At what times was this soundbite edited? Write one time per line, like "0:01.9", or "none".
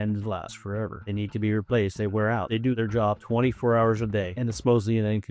0:02.6
0:04.3

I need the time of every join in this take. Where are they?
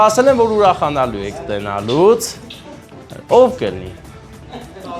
none

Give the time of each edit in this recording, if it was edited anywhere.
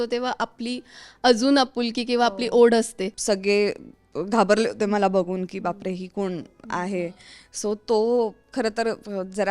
0:03.1

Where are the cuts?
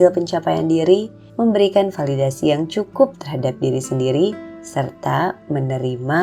0:01.2

